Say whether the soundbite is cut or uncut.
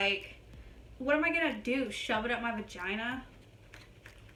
uncut